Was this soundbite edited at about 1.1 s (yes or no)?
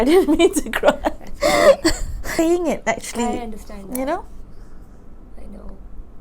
no